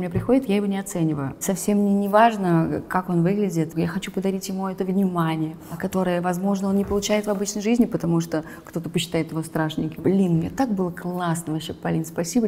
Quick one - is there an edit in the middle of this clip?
yes; 4 cuts; at 1.4 s, 3.7 s, 5.7 s, 9.9 s

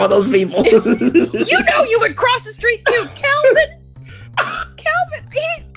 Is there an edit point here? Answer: no; 0 cuts

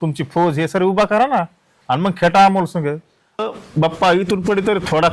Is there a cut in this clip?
yes; 1 cut; at 3.4 s

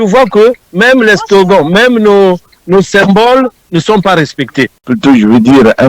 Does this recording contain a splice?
yes; 1 cut; at 4.8 s

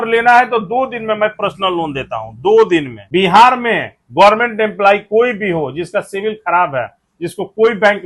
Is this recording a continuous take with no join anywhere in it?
no; 1 cut; at 3.0 s

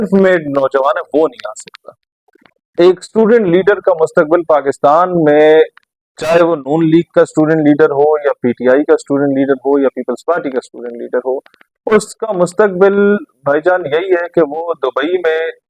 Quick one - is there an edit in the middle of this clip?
no; 0 cuts

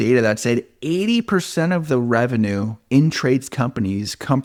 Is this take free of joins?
yes; 0 cuts

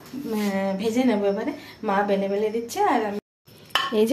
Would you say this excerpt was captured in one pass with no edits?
no; 1 cut; at 3.2 s

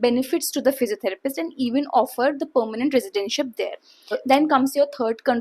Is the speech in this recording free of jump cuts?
no; 1 cut; at 4.2 s

